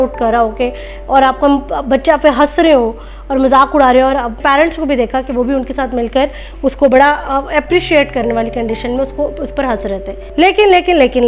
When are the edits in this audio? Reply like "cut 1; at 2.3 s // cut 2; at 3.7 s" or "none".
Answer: cut 1; at 4.4 s // cut 2; at 10.2 s